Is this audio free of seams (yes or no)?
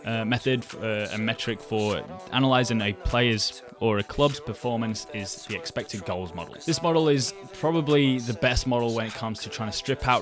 yes